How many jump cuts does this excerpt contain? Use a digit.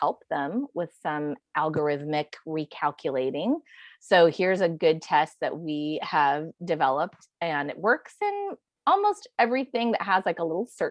0